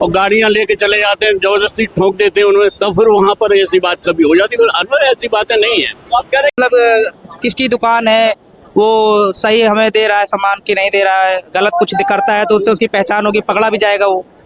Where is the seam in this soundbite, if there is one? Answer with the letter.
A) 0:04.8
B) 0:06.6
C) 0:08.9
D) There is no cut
B